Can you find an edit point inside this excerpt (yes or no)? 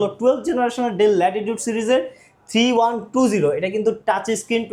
no